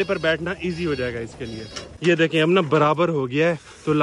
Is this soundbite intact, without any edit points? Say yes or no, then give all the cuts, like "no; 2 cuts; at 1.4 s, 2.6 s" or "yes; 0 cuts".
no; 1 cut; at 1.9 s